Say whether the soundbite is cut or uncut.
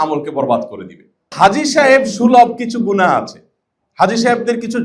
cut